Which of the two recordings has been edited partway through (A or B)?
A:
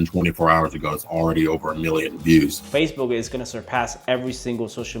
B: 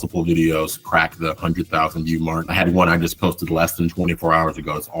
A